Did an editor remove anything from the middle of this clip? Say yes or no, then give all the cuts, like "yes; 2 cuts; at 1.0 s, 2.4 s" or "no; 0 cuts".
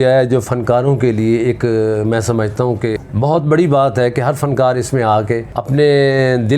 yes; 2 cuts; at 3.1 s, 5.5 s